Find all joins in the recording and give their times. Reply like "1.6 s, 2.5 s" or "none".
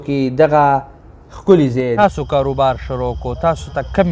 1.8 s